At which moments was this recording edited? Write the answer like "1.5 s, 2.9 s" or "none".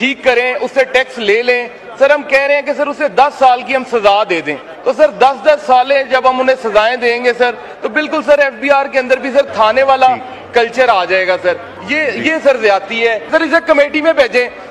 4.7 s, 13.3 s